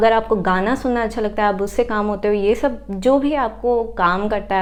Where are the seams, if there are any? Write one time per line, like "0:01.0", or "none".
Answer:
none